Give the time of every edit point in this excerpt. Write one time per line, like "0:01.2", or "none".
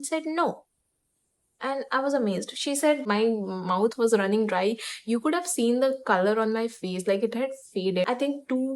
0:03.0
0:08.1